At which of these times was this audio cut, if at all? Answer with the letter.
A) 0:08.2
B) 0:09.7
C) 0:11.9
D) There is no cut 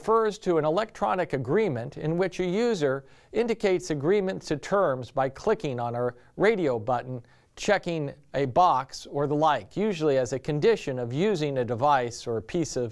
C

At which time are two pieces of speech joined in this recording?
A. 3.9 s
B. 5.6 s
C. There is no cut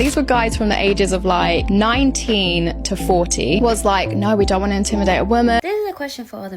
B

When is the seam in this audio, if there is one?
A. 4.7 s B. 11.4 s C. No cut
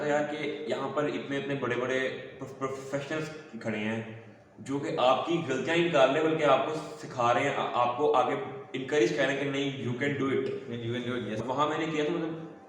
B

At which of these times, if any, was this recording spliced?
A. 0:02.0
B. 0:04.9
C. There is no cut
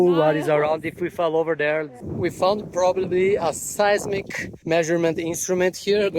A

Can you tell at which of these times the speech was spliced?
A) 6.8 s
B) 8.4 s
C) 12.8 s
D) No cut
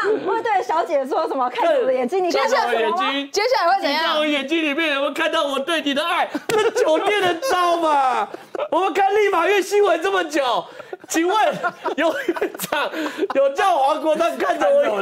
D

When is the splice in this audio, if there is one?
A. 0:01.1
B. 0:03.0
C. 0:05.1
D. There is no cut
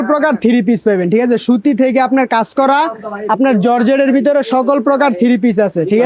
D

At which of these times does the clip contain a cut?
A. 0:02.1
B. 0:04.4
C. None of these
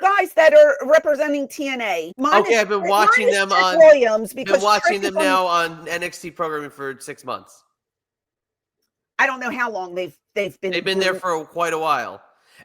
A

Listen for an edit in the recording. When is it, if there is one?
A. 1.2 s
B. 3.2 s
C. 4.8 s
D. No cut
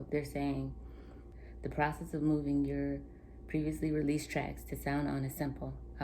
A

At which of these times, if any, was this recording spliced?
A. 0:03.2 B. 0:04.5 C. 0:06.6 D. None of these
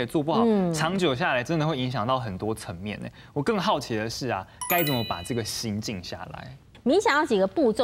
C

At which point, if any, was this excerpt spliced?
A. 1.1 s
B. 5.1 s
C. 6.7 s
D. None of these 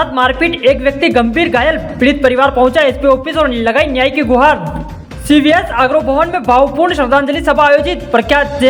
D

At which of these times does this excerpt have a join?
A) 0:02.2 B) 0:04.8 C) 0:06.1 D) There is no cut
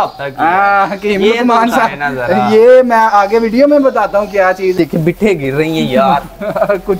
B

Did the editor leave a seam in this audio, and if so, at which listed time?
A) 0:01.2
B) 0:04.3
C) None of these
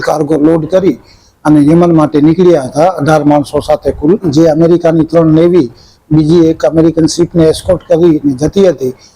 B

